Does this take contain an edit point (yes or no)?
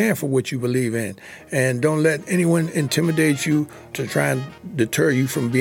no